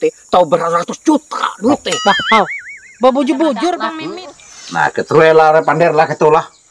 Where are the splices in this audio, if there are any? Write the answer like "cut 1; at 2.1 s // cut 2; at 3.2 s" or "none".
cut 1; at 4.0 s